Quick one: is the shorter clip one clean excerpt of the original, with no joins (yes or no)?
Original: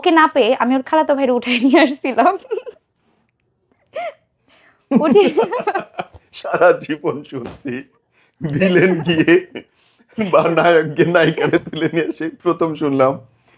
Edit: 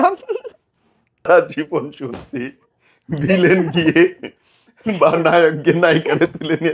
no